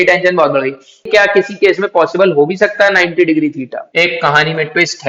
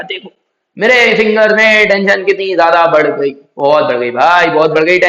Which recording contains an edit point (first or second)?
first